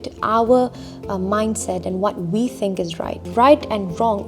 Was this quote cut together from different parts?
yes; 1 cut; at 3.2 s

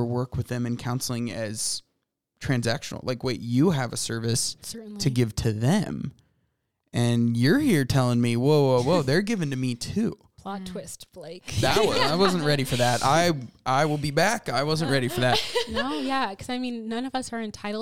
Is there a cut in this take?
no; 0 cuts

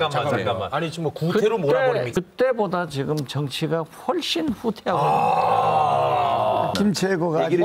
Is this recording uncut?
no; 2 cuts; at 2.1 s, 6.7 s

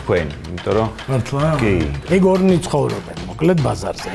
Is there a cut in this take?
yes; 1 cut; at 2.0 s

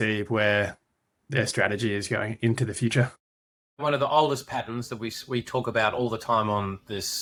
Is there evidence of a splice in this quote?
no; 0 cuts

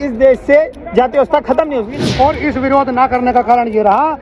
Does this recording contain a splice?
yes; 1 cut; at 1.9 s

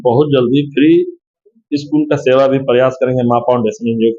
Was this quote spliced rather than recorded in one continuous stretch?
no; 0 cuts

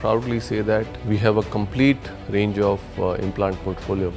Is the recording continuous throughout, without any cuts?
no; 1 cut; at 0.9 s

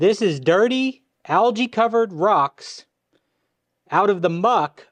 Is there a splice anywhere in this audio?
no; 0 cuts

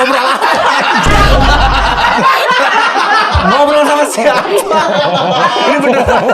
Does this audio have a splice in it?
no; 0 cuts

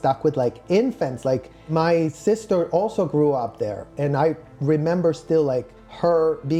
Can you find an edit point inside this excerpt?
no; 0 cuts

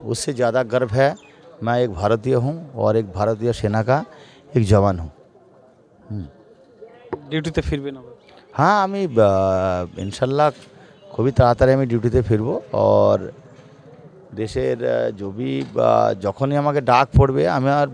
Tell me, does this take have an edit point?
no; 0 cuts

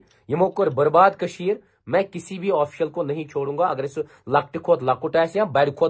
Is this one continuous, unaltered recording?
yes; 0 cuts

